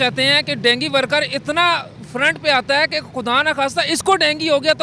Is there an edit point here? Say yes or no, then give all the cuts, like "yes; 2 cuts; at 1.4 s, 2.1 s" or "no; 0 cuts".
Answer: no; 0 cuts